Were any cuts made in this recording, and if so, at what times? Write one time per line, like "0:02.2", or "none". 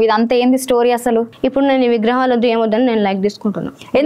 0:01.3